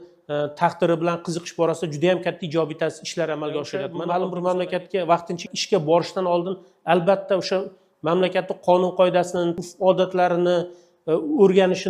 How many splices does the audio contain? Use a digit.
1